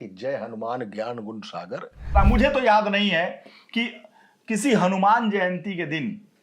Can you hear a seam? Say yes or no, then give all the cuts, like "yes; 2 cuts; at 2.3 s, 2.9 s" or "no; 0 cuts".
yes; 1 cut; at 2.1 s